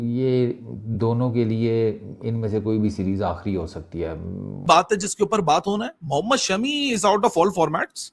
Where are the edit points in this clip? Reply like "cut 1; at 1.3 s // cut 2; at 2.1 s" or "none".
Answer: cut 1; at 4.6 s